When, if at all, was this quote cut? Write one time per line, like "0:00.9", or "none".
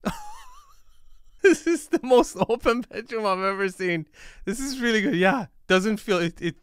none